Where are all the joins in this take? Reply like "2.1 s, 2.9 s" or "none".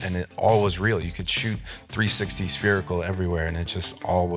none